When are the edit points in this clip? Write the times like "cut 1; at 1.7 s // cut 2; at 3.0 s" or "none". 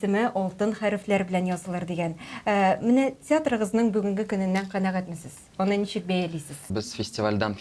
cut 1; at 6.7 s